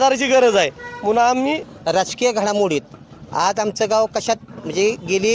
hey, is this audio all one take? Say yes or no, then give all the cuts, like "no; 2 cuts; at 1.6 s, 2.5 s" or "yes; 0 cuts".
no; 1 cut; at 1.7 s